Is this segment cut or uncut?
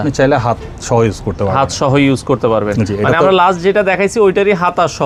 uncut